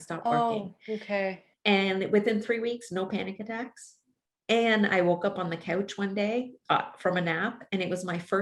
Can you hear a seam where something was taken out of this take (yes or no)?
yes